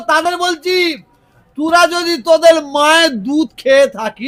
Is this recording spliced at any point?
no; 0 cuts

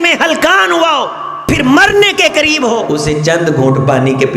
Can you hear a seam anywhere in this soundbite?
yes; 2 cuts; at 1.2 s, 2.9 s

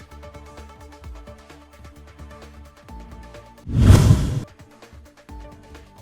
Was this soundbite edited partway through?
yes; 1 cut; at 3.2 s

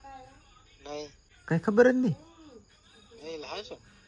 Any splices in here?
yes; 1 cut; at 1.3 s

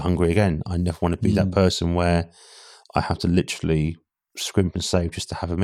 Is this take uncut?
yes; 0 cuts

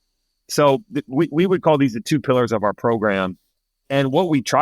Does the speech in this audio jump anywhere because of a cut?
no; 0 cuts

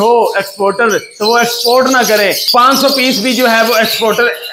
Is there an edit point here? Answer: no; 0 cuts

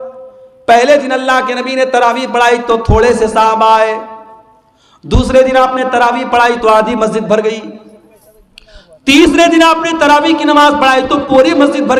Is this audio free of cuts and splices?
yes; 0 cuts

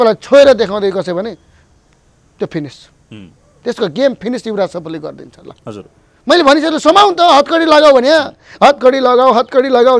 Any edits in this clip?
no; 0 cuts

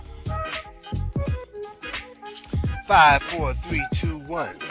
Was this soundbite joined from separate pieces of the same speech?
no; 0 cuts

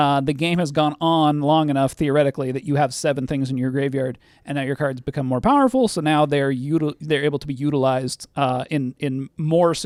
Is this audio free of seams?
yes; 0 cuts

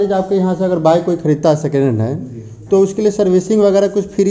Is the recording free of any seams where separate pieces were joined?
yes; 0 cuts

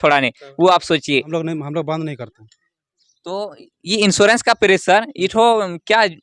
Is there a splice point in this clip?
yes; 1 cut; at 1.3 s

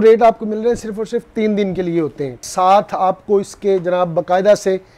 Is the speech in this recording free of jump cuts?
no; 1 cut; at 2.5 s

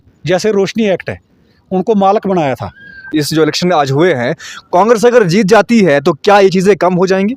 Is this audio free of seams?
no; 1 cut; at 3.1 s

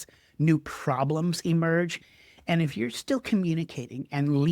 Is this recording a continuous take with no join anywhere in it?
no; 1 cut; at 2.0 s

